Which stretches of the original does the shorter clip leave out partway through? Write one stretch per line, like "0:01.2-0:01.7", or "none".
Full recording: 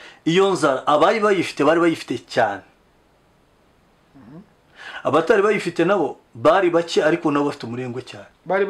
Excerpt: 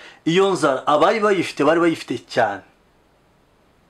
none